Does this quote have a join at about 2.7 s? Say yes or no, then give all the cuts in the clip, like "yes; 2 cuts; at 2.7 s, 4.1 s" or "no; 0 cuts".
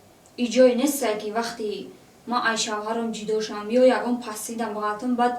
no; 0 cuts